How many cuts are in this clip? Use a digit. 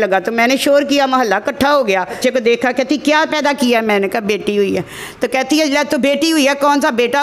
1